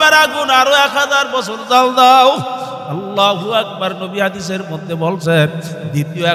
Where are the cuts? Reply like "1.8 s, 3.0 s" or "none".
none